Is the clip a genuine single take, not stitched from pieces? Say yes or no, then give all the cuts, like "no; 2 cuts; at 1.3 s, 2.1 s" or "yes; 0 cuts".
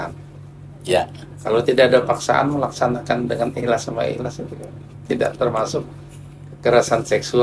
yes; 0 cuts